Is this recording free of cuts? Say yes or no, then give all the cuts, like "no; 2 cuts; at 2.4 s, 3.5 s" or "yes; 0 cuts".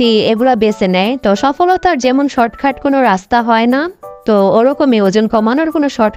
yes; 0 cuts